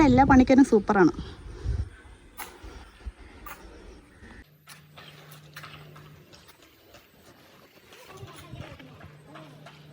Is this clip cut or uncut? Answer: uncut